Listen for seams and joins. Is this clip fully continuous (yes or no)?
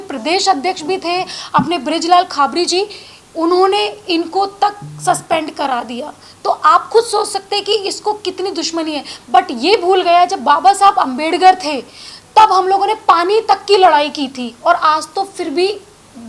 yes